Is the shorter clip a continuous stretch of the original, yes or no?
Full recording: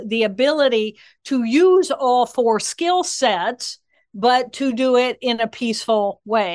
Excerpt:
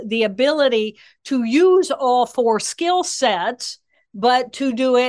yes